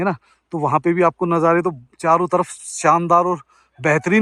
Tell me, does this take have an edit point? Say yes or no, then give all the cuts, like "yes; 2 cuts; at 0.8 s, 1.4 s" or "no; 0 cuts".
no; 0 cuts